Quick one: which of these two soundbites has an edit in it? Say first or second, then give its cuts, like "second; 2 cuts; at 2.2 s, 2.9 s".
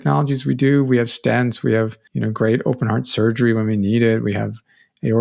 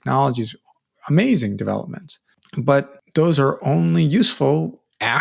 first; 1 cut; at 2.0 s